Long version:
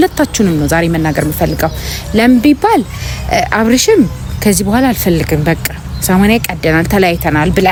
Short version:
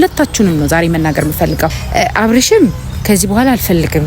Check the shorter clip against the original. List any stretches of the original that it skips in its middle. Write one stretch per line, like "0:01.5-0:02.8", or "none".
0:01.8-0:03.1